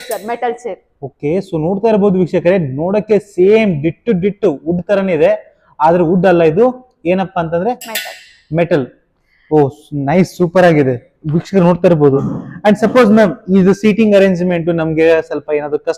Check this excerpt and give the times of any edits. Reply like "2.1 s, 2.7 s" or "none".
none